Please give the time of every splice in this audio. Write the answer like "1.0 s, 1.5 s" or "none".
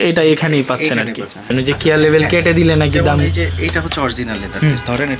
1.5 s